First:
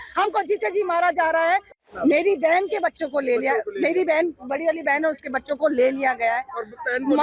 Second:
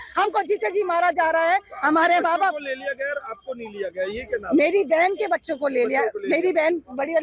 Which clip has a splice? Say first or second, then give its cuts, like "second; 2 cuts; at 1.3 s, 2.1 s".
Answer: first; 1 cut; at 1.7 s